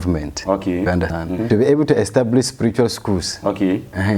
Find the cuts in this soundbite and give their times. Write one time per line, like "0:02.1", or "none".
0:01.2